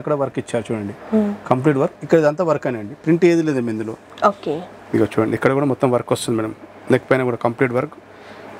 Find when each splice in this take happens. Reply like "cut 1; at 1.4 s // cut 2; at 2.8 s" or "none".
none